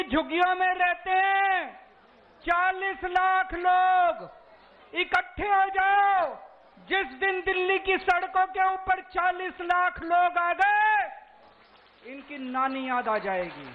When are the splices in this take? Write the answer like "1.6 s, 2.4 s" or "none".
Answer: none